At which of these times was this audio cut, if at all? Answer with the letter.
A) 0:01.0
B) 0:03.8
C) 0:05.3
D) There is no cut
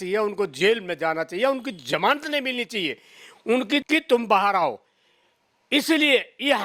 B